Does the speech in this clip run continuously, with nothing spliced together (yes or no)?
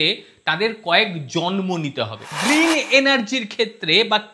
no